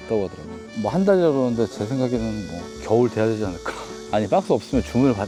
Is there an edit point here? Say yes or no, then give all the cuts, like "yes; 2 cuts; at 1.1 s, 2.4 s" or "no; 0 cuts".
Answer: no; 0 cuts